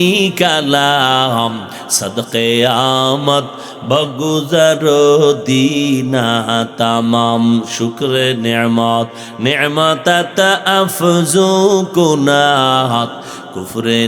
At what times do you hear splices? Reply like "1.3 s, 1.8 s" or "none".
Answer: none

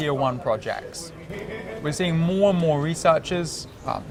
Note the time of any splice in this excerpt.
none

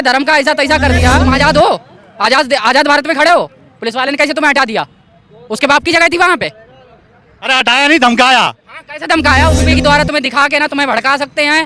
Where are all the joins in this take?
1.2 s, 9.6 s

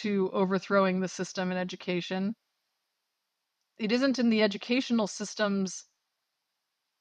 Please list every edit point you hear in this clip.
none

